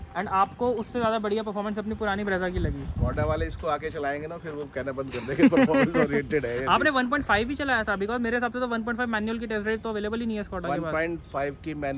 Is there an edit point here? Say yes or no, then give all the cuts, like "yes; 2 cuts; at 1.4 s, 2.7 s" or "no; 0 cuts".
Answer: no; 0 cuts